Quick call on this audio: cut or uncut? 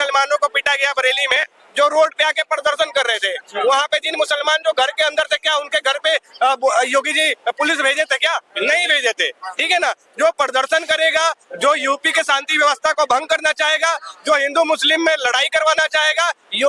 uncut